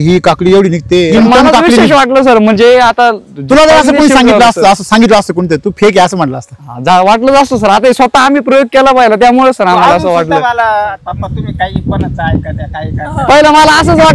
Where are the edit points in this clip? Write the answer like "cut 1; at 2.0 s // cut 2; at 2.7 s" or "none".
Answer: cut 1; at 1.1 s // cut 2; at 11.0 s